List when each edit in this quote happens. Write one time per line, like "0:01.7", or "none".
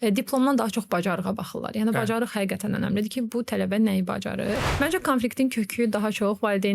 0:04.7